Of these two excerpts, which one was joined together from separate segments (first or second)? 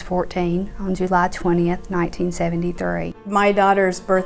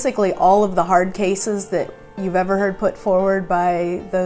first